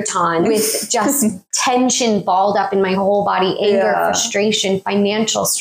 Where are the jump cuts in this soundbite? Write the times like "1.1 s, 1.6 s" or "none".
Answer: 1.5 s